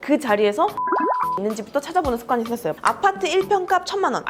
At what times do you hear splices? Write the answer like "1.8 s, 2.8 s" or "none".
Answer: 1.1 s, 2.8 s